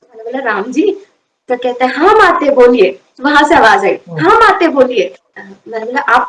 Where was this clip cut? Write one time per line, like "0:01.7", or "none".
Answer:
none